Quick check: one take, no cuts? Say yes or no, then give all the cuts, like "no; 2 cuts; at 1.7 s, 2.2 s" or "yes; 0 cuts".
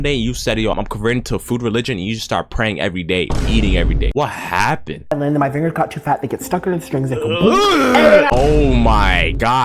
no; 2 cuts; at 5.1 s, 8.3 s